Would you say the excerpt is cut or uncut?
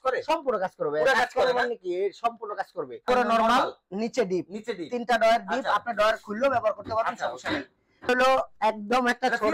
cut